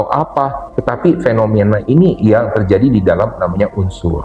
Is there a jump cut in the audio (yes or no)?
no